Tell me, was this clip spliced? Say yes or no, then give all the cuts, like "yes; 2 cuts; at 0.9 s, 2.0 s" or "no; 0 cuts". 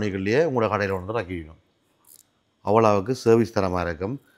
no; 0 cuts